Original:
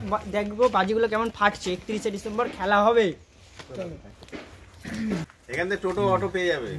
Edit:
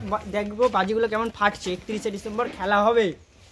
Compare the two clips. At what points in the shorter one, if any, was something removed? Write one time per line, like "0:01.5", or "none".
none